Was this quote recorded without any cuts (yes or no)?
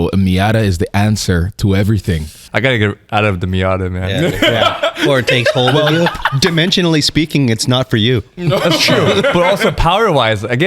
no